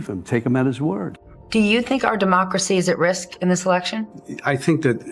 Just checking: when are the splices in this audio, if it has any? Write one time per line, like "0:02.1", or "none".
0:01.2